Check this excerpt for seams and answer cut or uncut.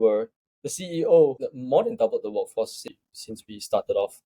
cut